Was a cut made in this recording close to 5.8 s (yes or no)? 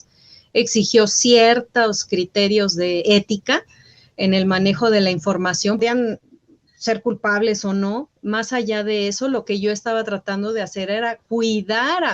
yes